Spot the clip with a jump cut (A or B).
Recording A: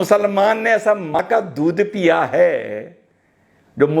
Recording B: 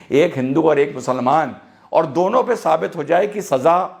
A